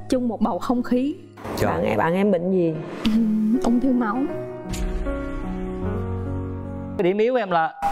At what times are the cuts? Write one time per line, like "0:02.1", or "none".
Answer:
0:07.0